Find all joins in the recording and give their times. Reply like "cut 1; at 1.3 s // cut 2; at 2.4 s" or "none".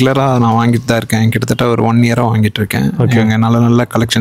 none